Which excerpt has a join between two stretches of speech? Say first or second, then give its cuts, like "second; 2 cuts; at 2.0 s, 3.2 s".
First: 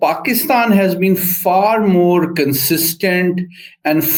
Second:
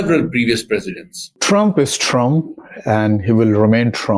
second; 1 cut; at 1.4 s